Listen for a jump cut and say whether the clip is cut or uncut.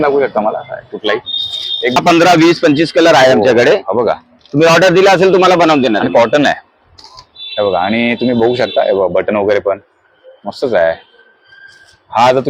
cut